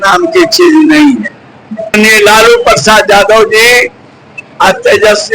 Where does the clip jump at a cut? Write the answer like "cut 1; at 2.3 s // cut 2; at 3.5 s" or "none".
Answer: cut 1; at 1.9 s

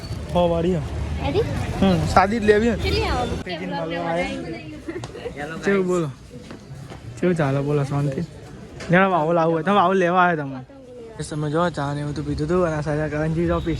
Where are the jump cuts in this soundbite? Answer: cut 1; at 3.4 s // cut 2; at 11.2 s

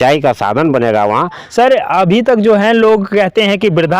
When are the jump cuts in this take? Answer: cut 1; at 1.4 s

